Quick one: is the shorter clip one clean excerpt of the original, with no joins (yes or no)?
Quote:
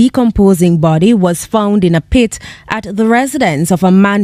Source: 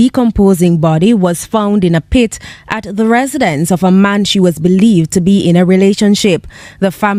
yes